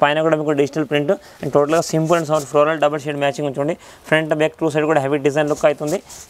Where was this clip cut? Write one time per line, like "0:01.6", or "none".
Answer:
none